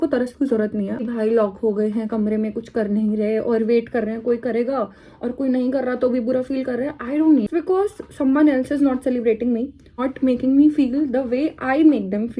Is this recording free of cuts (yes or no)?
no